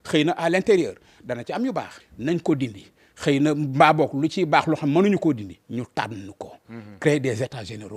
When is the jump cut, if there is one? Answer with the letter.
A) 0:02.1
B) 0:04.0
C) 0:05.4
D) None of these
D